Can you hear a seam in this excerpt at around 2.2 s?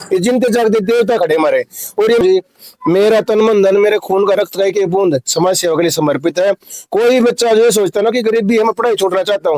yes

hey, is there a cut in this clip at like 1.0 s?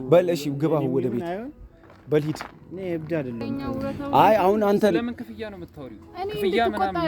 no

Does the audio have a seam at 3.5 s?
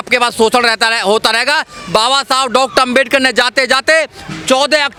no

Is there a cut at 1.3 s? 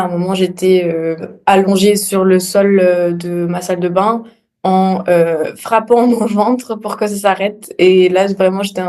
yes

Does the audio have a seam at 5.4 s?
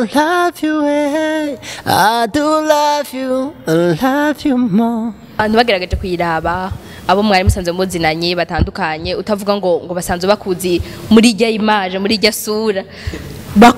yes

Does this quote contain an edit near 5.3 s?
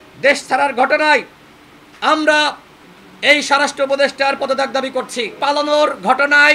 yes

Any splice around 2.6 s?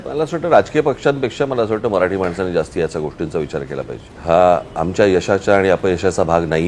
no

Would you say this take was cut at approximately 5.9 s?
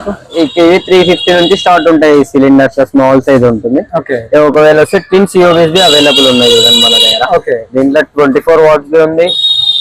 no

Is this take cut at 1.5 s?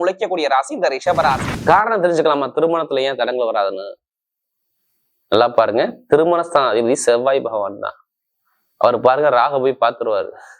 yes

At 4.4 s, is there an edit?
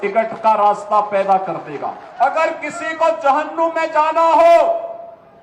no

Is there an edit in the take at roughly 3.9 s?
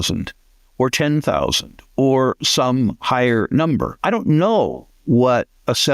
yes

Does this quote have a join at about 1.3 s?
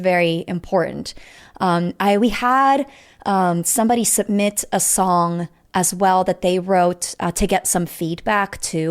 no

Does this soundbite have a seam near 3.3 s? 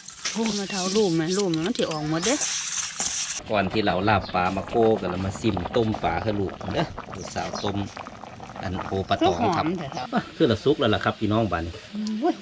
yes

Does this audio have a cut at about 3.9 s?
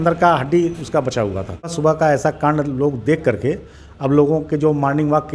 no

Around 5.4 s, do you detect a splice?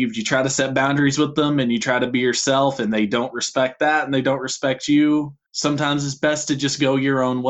yes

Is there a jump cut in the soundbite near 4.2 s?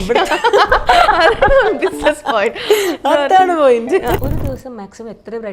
yes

